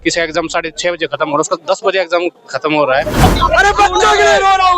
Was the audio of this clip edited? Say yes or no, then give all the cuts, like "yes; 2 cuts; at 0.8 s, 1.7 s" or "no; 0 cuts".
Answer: yes; 1 cut; at 3.2 s